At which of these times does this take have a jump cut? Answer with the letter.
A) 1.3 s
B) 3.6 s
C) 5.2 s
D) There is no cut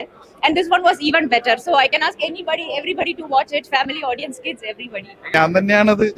C